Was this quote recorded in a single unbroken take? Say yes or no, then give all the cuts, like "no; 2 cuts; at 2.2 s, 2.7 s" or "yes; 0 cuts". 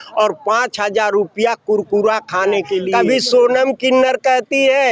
no; 1 cut; at 2.9 s